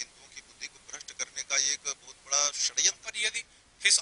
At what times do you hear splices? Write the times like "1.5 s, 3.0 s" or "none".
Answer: 3.0 s